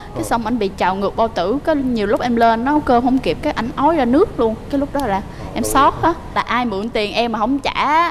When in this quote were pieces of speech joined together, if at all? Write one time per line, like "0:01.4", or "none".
0:06.4

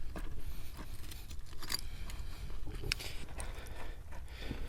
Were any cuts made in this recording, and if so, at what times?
0:03.2

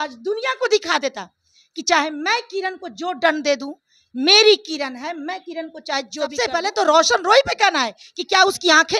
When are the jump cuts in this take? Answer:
0:06.4

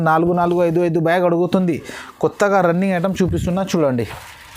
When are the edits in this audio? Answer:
none

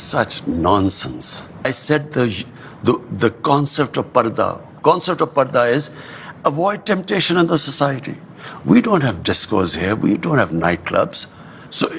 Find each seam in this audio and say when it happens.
0:01.6

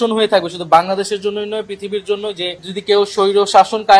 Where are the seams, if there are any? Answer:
0:02.6

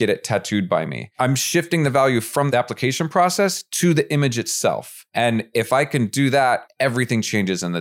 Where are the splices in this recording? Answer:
0:01.1
0:02.5
0:05.0
0:06.7

